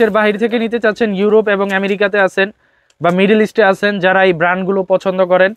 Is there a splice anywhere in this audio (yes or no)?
no